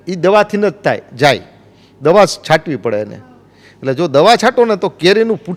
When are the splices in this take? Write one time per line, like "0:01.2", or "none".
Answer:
none